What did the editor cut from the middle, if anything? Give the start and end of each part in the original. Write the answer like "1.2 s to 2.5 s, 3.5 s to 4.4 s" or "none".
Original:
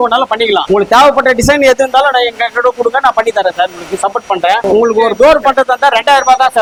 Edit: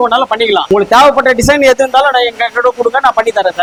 none